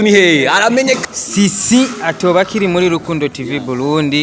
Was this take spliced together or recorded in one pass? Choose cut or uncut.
cut